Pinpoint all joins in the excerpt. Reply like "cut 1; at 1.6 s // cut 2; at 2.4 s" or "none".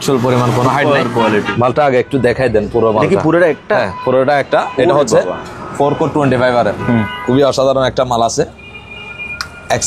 cut 1; at 1.3 s // cut 2; at 6.9 s